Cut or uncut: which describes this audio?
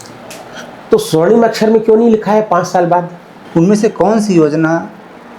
cut